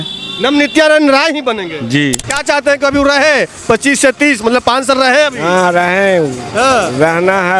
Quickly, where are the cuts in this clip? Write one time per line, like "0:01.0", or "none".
0:02.3